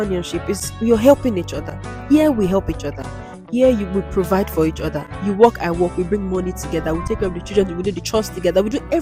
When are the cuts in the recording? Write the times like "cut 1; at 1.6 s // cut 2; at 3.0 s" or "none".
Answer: none